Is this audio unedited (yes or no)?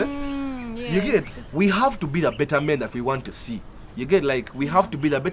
no